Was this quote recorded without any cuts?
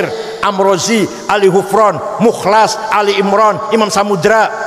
yes; 0 cuts

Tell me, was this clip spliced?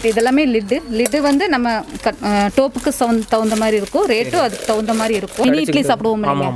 no; 0 cuts

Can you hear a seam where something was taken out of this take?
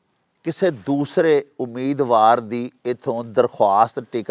no; 0 cuts

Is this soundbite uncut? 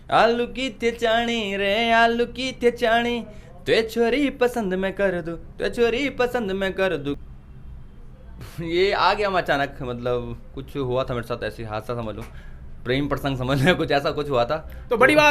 no; 1 cut; at 7.2 s

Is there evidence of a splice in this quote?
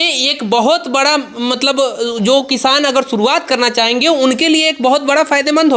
no; 0 cuts

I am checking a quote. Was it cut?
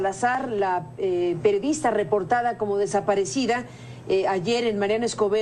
yes; 1 cut; at 4.2 s

